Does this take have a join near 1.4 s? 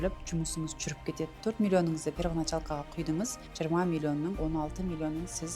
yes; 3 cuts; at 1.4 s, 3.4 s, 4.4 s

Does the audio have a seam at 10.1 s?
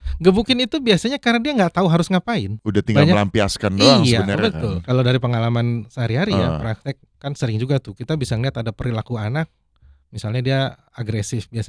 no; 1 cut; at 4.8 s

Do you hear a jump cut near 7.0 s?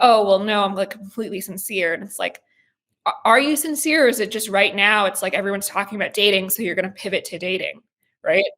no; 0 cuts

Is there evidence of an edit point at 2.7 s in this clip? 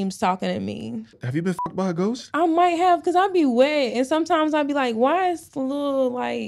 no; 1 cut; at 1.2 s

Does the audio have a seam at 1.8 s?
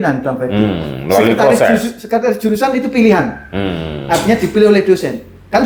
no; 0 cuts

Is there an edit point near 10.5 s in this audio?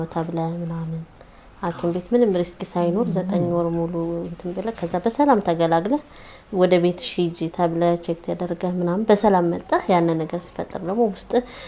no; 0 cuts

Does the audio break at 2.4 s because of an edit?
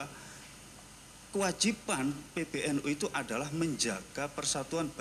no; 0 cuts

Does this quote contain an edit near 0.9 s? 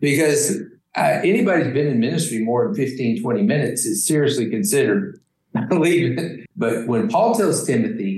no; 1 cut; at 6.4 s

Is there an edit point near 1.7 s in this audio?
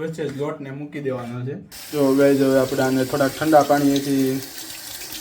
yes; 1 cut; at 1.7 s

